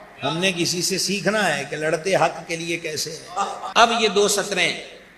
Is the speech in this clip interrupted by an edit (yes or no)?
yes